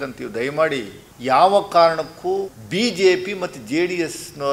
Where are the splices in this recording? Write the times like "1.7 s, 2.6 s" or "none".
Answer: 1.0 s, 2.6 s